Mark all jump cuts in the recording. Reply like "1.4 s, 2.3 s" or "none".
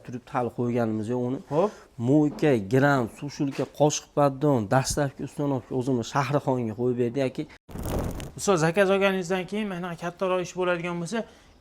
7.8 s